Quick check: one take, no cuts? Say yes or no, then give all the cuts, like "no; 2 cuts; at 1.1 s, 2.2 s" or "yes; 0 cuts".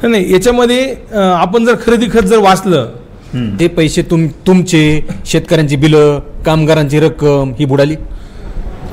no; 1 cut; at 3.6 s